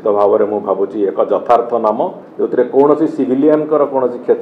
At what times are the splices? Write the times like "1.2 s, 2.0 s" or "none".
2.2 s